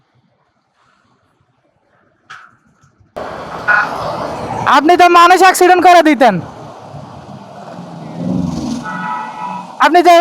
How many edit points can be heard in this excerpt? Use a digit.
1